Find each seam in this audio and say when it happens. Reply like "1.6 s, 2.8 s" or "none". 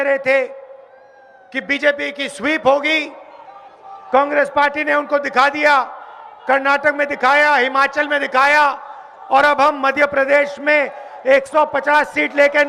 none